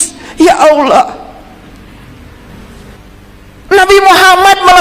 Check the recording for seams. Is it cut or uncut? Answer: cut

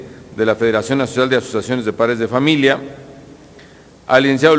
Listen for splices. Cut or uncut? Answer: cut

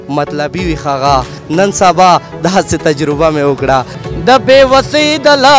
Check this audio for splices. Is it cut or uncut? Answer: cut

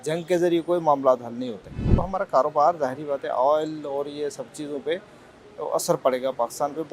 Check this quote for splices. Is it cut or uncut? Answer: cut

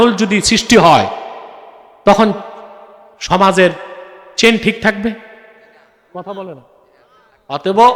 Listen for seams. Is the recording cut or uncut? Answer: uncut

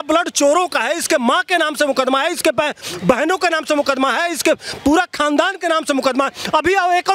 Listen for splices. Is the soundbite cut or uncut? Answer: uncut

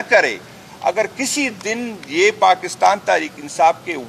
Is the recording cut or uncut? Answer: uncut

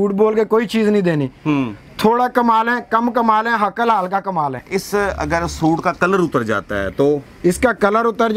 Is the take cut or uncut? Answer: cut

